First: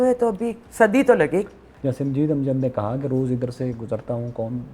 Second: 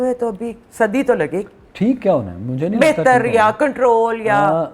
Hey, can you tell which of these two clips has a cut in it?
first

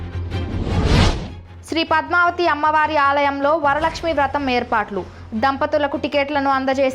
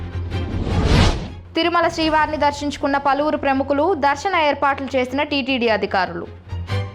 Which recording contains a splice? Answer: first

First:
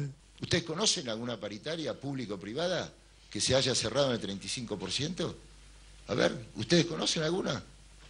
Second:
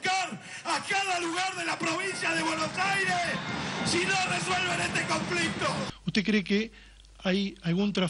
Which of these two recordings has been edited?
second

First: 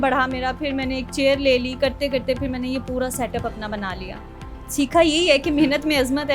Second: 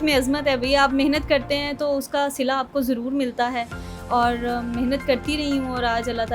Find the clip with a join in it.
first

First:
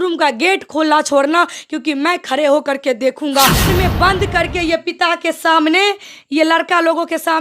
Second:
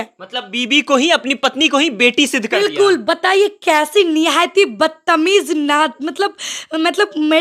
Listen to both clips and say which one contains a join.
first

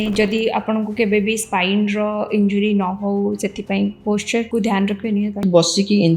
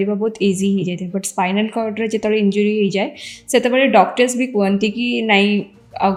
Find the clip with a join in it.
first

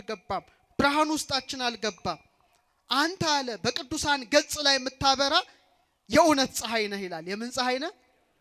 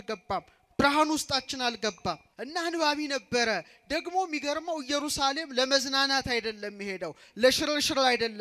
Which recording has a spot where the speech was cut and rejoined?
second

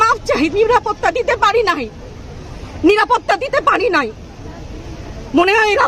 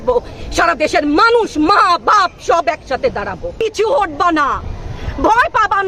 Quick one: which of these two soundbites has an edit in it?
second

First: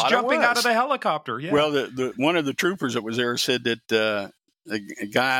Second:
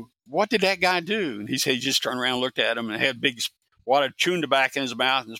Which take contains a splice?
first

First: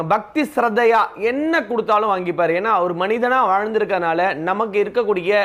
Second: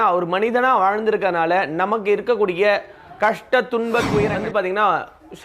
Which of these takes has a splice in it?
second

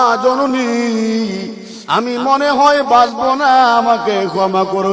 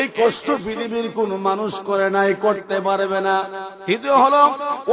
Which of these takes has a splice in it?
first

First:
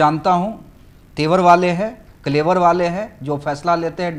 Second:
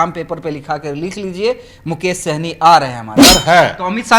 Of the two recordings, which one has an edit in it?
second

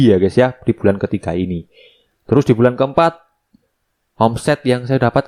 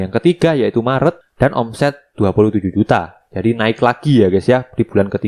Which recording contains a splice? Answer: second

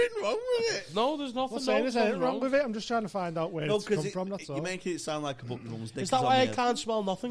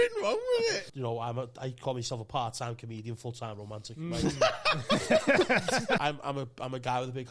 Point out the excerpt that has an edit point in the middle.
second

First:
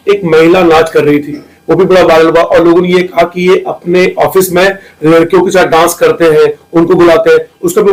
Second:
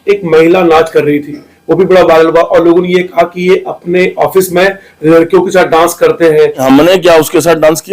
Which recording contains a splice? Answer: second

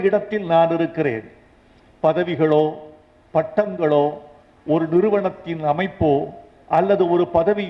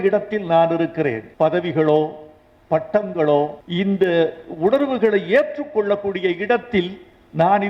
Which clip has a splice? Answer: second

